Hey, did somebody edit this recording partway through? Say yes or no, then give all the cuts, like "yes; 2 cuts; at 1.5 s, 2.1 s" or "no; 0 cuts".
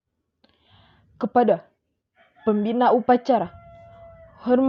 no; 0 cuts